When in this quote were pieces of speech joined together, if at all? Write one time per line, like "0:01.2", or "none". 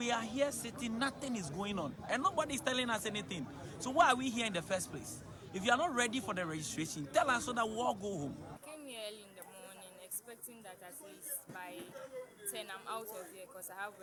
none